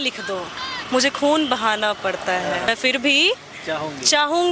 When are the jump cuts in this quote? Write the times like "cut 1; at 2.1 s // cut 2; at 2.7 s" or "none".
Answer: cut 1; at 2.7 s